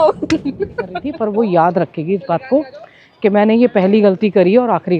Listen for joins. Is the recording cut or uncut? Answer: cut